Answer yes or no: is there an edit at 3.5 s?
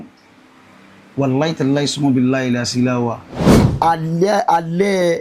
yes